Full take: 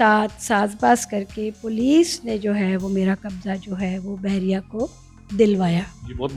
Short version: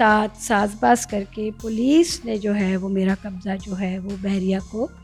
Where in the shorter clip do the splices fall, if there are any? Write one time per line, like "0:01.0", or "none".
none